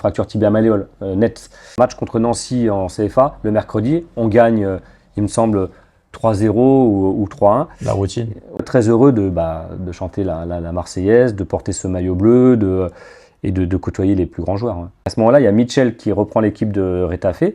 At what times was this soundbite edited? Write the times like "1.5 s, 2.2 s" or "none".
1.8 s, 8.6 s, 15.1 s

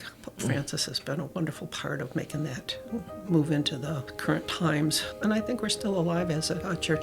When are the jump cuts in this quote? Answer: none

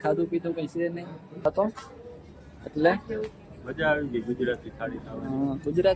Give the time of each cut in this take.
1.4 s

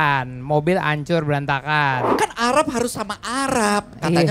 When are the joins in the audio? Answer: 2.0 s

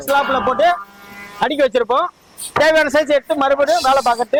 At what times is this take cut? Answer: none

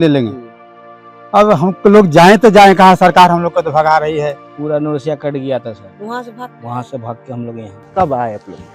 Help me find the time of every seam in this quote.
4.4 s, 7.8 s

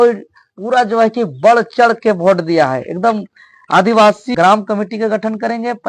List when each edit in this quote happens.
4.3 s

